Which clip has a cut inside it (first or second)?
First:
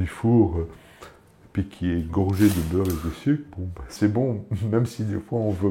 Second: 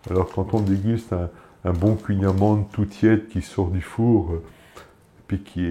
first